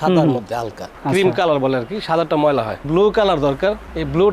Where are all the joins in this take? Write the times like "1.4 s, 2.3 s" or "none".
2.8 s

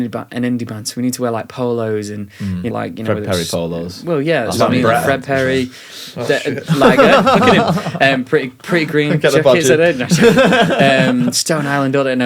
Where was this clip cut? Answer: 2.7 s

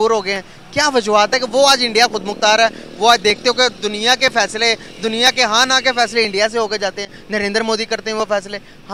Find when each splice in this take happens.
none

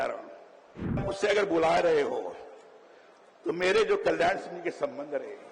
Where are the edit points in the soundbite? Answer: 1.0 s

